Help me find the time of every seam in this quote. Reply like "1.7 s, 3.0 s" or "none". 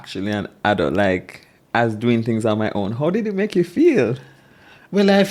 none